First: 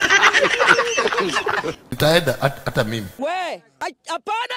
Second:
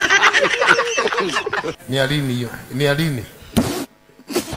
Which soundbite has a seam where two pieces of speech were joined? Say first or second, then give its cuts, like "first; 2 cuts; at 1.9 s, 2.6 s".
second; 1 cut; at 1.4 s